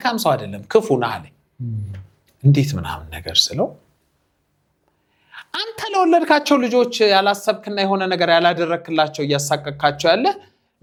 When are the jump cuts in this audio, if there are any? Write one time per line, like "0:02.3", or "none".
none